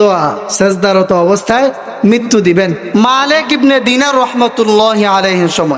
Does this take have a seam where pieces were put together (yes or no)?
yes